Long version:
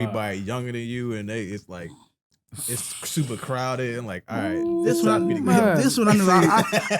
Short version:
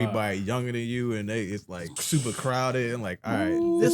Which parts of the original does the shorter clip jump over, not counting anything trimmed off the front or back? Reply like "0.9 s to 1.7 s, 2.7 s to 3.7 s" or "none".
1.9 s to 3.0 s